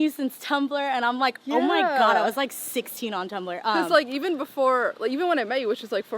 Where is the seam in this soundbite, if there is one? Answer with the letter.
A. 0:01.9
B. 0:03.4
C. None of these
C